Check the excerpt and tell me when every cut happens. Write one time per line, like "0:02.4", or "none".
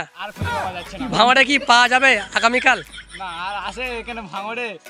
none